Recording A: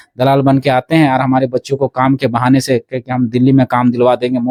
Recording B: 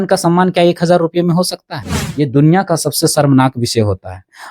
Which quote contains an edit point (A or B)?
B